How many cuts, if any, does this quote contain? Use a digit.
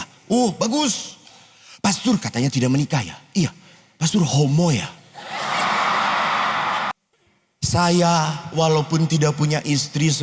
1